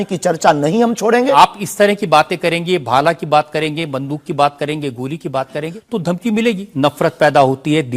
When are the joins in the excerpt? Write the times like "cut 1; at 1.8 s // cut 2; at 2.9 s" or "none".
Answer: cut 1; at 1.3 s // cut 2; at 5.8 s // cut 3; at 6.7 s